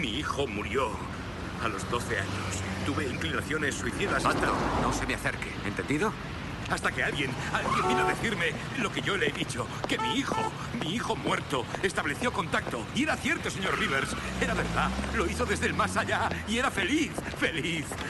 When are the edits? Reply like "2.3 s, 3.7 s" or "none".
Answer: none

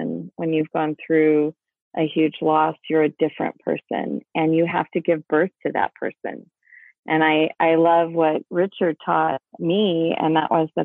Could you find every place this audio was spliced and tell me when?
none

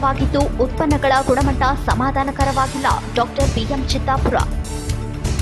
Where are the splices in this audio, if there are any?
none

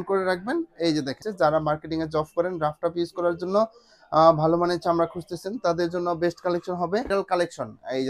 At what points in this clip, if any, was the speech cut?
1.3 s, 7.1 s

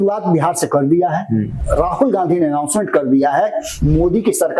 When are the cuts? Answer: 1.5 s, 3.7 s

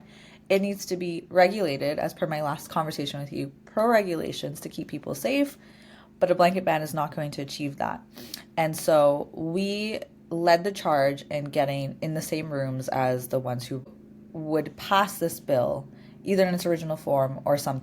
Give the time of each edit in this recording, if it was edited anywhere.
13.9 s

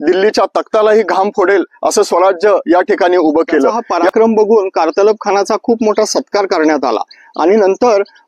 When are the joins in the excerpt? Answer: 3.9 s

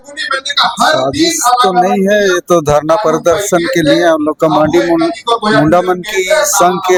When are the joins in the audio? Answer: none

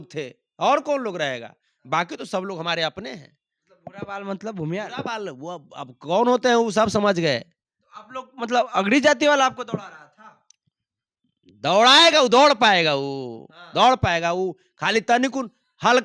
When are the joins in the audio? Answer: none

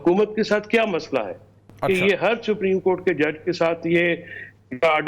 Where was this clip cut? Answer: none

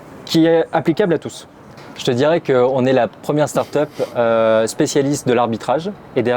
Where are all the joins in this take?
1.6 s

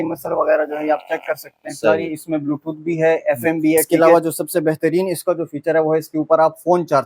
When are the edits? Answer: 1.9 s, 3.9 s

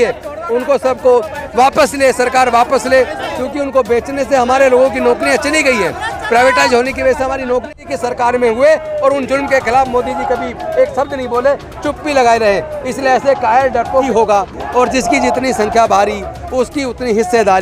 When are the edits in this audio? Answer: 7.8 s, 14.1 s

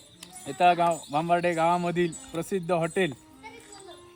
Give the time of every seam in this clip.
none

